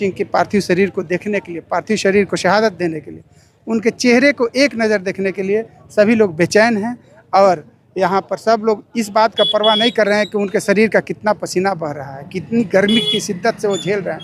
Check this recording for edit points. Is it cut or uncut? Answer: uncut